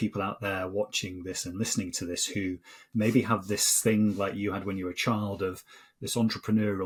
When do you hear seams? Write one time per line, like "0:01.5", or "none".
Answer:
none